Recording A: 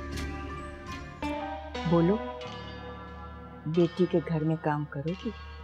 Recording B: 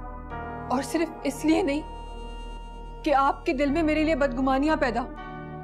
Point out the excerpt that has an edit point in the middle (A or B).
A